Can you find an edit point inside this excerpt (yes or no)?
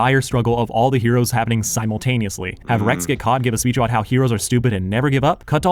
no